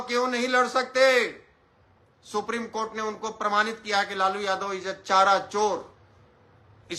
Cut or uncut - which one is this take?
uncut